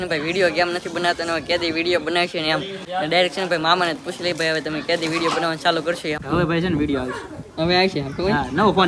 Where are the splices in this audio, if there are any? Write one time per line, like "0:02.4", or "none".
0:02.8
0:06.2